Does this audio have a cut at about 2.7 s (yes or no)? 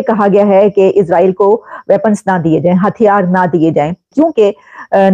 no